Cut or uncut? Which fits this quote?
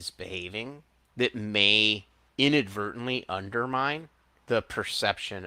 cut